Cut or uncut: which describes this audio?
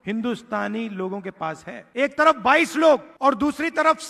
cut